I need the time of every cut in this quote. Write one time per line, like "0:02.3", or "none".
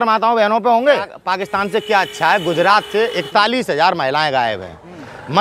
0:01.2